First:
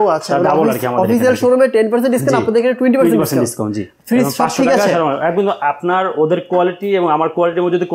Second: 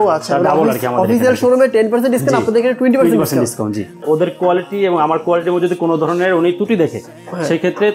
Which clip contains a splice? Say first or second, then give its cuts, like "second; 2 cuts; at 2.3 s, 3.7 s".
second; 1 cut; at 4.0 s